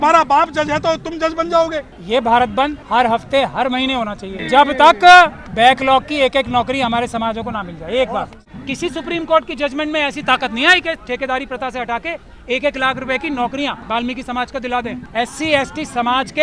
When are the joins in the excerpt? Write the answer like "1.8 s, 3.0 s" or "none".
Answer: 1.9 s, 2.8 s, 4.3 s, 5.4 s, 8.4 s, 13.8 s, 15.0 s

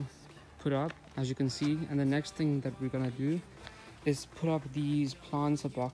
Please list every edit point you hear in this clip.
1.0 s

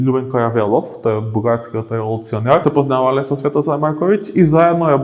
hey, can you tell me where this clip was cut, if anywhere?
2.6 s

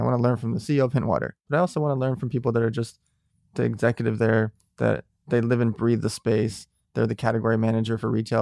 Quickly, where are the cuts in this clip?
1.4 s

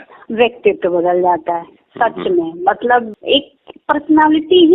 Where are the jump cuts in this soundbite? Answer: 3.1 s

